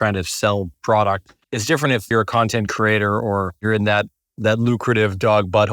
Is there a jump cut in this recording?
yes; 2 cuts; at 1.9 s, 3.6 s

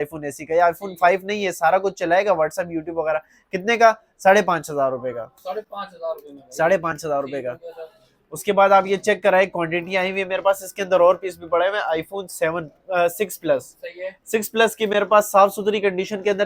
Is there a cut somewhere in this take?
no; 0 cuts

